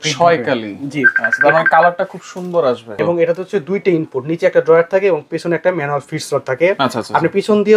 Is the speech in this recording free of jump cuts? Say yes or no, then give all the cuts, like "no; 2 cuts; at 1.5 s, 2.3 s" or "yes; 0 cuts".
no; 1 cut; at 2.9 s